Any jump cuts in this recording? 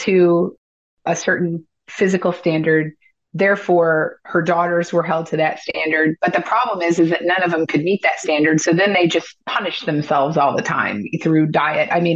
no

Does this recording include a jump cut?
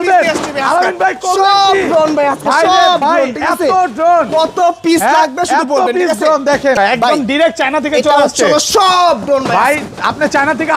yes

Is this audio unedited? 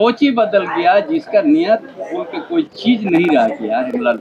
yes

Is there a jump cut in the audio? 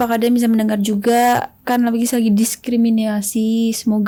no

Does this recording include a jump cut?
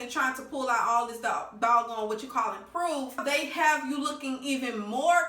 yes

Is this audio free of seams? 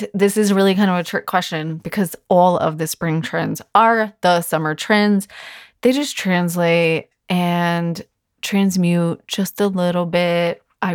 yes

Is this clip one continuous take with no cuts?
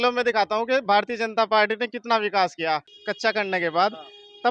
no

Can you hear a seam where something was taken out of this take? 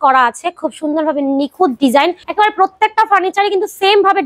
yes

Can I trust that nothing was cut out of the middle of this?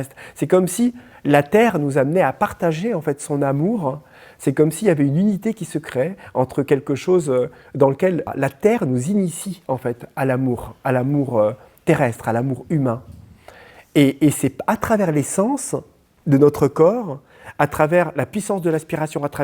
no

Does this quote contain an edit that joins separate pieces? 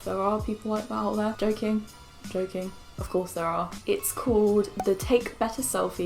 no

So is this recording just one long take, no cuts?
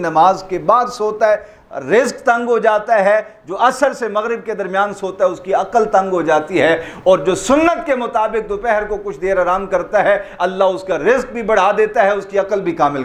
yes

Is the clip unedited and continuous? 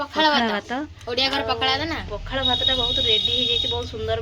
yes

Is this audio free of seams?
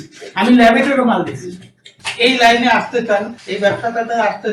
no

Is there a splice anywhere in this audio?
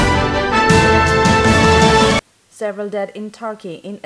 yes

